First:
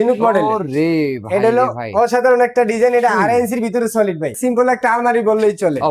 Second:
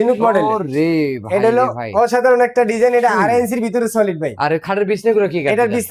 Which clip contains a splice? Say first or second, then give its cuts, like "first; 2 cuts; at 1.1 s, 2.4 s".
first; 1 cut; at 4.4 s